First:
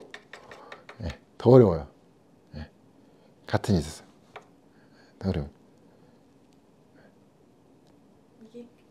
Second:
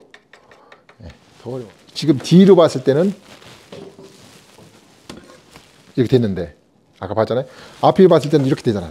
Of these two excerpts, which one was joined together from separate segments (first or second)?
second